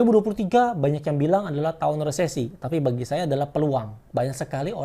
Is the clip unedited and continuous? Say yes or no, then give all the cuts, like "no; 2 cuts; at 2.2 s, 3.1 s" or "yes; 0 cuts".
yes; 0 cuts